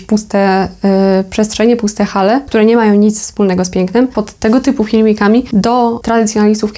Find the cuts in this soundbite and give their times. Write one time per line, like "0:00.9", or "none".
0:02.5
0:04.1
0:05.9